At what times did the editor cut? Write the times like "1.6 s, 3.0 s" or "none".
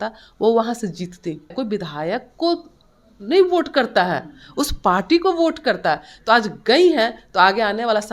1.5 s